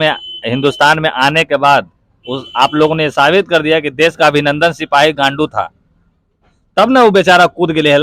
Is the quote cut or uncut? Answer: uncut